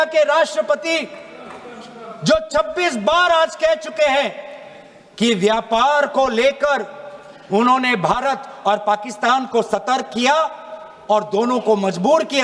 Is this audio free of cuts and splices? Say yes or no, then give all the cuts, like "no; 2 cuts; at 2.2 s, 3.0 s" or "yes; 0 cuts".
yes; 0 cuts